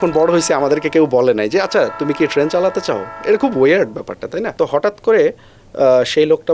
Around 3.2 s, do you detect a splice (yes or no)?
no